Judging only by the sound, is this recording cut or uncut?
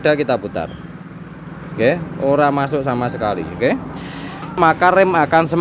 cut